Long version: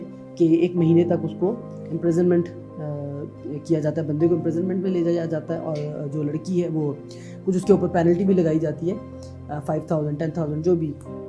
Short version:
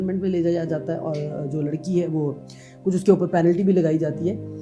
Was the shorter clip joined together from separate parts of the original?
no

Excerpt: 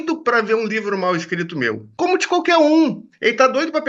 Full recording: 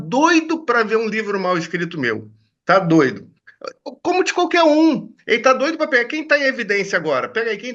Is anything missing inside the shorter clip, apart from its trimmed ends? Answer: yes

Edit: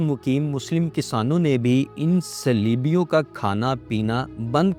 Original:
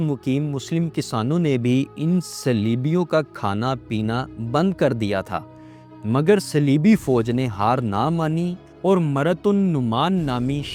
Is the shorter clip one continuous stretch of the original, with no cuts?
yes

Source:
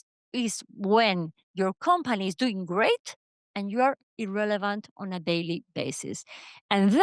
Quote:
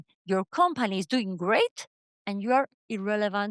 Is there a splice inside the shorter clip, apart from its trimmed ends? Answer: no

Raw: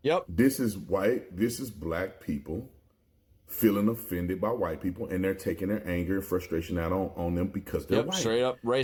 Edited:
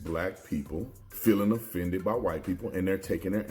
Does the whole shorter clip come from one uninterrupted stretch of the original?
no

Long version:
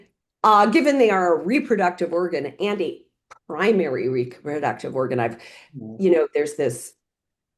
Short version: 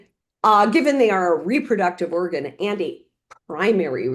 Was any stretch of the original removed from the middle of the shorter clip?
no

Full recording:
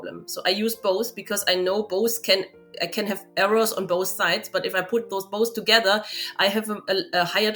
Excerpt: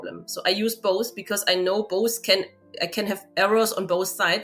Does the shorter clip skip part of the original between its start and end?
no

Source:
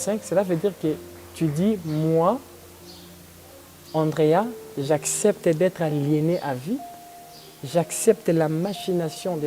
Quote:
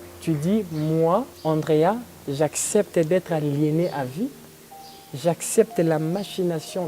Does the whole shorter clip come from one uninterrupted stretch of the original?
no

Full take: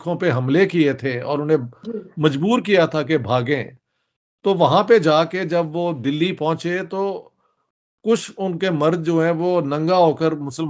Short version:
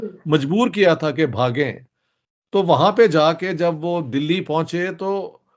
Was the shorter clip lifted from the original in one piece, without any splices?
yes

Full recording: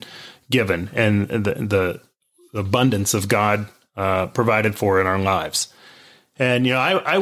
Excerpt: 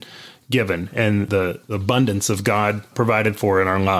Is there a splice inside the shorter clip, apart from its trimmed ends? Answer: yes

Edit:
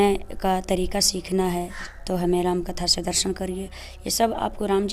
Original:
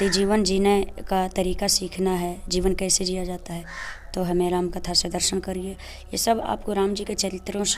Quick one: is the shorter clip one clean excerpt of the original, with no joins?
no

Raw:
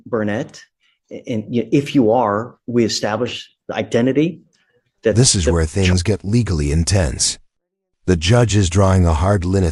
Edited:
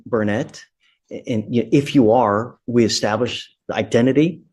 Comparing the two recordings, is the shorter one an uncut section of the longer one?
yes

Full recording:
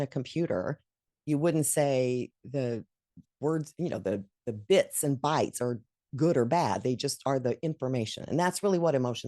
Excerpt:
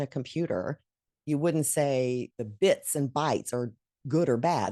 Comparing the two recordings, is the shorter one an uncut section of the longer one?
no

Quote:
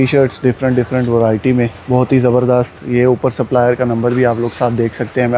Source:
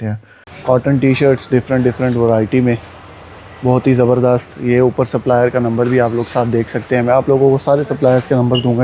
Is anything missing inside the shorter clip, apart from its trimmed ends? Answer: yes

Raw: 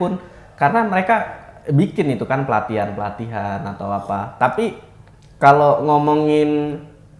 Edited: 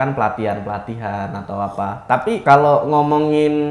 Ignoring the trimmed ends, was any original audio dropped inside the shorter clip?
yes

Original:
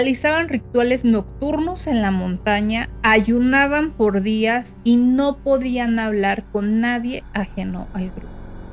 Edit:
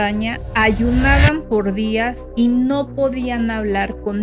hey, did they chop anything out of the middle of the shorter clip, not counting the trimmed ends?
no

